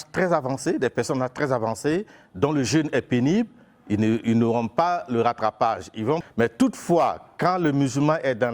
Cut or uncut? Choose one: cut